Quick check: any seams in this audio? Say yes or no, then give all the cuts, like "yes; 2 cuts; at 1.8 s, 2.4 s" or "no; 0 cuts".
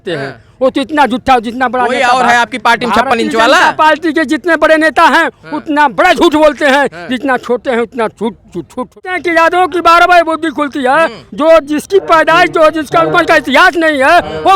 yes; 1 cut; at 9.0 s